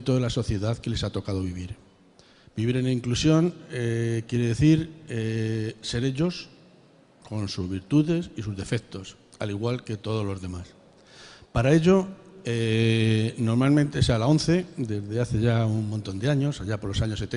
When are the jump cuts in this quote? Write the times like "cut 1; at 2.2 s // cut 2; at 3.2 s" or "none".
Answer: cut 1; at 5.2 s